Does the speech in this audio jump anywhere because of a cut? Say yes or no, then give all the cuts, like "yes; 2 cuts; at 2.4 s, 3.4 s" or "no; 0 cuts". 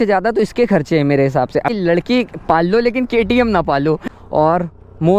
yes; 2 cuts; at 1.7 s, 4.1 s